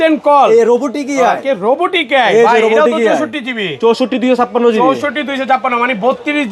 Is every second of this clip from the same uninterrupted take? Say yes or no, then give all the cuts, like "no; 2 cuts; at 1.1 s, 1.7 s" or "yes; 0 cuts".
yes; 0 cuts